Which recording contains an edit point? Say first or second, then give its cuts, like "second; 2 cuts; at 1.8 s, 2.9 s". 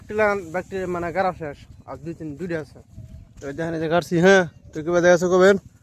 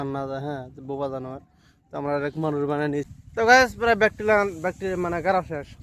second; 1 cut; at 3.1 s